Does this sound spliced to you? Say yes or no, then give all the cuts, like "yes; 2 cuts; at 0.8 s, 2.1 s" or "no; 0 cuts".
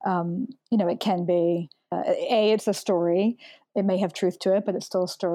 yes; 1 cut; at 1.9 s